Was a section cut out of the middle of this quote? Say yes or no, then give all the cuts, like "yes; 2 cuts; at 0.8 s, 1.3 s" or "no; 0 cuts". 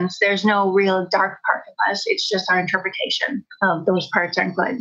yes; 1 cut; at 3.5 s